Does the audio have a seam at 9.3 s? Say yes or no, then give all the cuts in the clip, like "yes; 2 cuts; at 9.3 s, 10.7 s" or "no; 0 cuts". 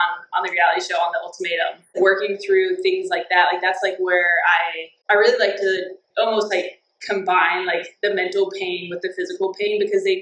no; 1 cut; at 1.9 s